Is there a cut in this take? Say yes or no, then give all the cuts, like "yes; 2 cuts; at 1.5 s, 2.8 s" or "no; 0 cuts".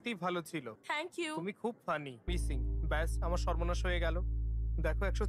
yes; 2 cuts; at 0.8 s, 2.3 s